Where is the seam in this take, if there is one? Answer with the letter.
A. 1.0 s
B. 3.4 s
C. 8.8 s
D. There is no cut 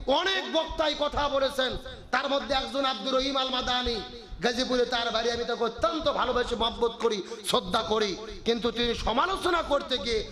D